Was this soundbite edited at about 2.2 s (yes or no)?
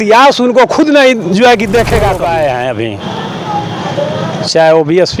yes